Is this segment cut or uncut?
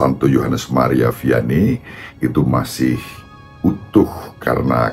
uncut